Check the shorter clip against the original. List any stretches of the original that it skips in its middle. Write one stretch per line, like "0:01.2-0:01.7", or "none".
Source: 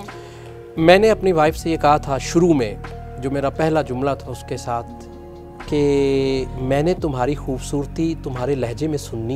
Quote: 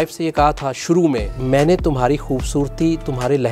0:02.8-0:06.5